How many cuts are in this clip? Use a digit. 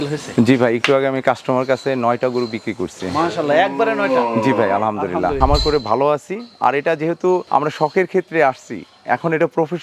1